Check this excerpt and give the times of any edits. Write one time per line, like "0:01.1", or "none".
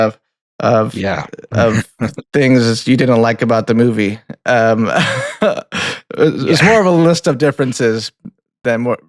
none